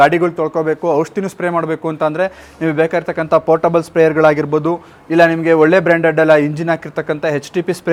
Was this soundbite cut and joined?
no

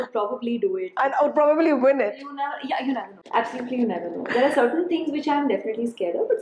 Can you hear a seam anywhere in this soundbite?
no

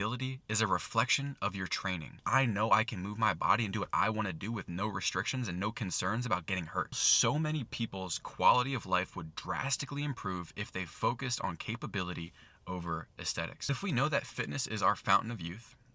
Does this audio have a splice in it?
yes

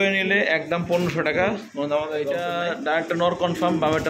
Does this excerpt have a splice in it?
yes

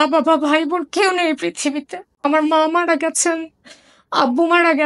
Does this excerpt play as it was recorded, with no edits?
yes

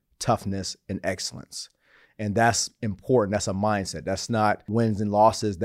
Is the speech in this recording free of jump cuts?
no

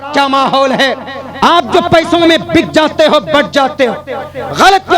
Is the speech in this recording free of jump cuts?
no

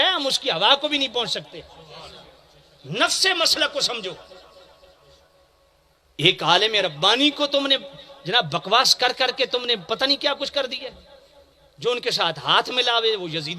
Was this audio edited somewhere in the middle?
no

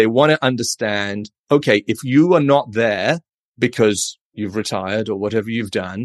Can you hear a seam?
no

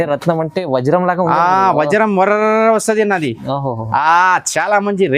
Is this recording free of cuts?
yes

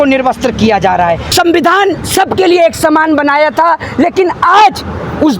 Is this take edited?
yes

